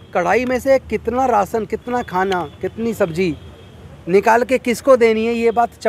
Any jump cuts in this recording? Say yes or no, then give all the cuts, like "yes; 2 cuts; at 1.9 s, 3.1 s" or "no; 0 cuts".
no; 0 cuts